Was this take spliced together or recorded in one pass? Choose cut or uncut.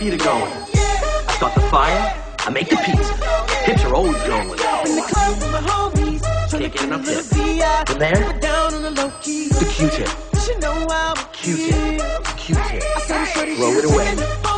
cut